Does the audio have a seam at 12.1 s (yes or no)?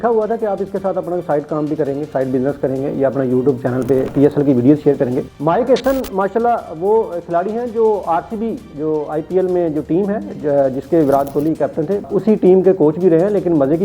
yes